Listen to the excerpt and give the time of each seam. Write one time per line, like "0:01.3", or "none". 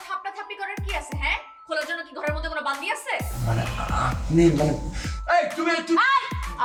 none